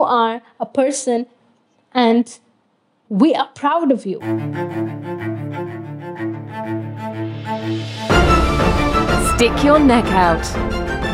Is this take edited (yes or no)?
yes